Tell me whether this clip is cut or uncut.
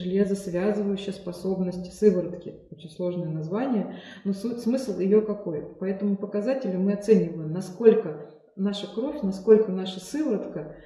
uncut